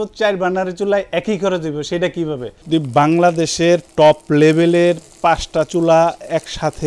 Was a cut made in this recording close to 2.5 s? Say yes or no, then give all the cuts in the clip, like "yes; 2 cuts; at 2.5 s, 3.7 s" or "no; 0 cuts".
yes; 1 cut; at 2.5 s